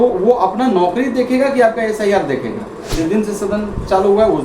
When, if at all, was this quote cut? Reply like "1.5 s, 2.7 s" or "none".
2.9 s